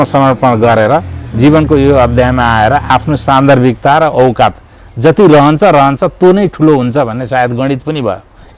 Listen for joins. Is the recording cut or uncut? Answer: uncut